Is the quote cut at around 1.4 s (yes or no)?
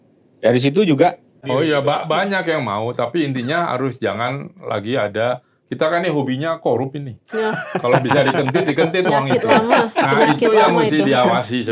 yes